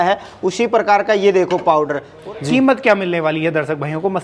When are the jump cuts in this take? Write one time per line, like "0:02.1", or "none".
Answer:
0:02.1